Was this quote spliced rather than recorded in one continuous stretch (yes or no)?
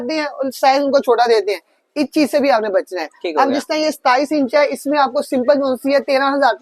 no